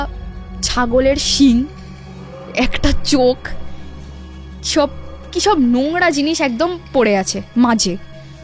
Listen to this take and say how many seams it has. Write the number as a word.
zero